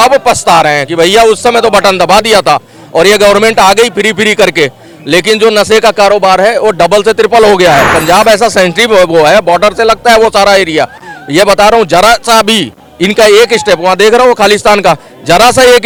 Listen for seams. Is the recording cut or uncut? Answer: uncut